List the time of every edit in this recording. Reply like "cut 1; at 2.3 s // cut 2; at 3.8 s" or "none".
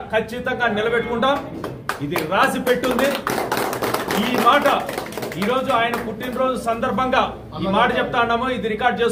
none

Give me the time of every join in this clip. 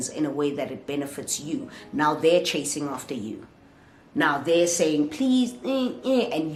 none

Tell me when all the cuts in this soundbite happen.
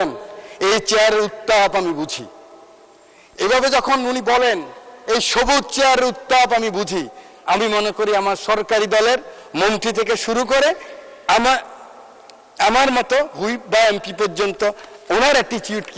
none

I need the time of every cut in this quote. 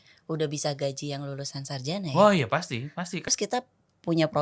cut 1; at 3.3 s

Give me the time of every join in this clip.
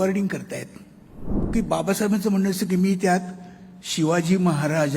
cut 1; at 1.3 s

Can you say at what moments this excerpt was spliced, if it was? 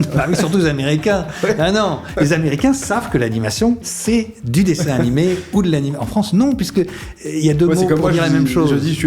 cut 1; at 2.0 s

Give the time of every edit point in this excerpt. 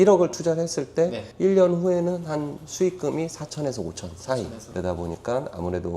cut 1; at 4.6 s

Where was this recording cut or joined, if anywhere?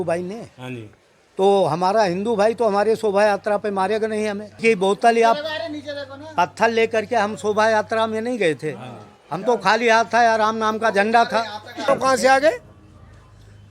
cut 1; at 4.6 s // cut 2; at 11.9 s

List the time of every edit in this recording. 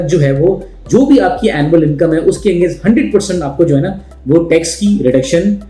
none

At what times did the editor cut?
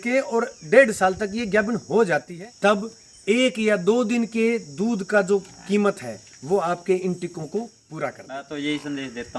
cut 1; at 2.3 s // cut 2; at 8.5 s

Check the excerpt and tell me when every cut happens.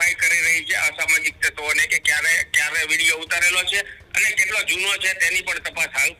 none

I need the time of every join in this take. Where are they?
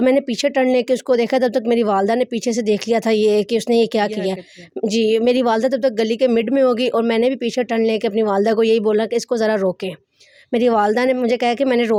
none

